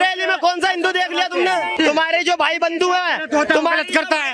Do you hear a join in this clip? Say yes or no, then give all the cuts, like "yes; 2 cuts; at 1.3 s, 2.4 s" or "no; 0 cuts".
yes; 1 cut; at 1.7 s